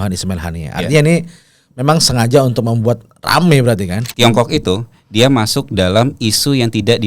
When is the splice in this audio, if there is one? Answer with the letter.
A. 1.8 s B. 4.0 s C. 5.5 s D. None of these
B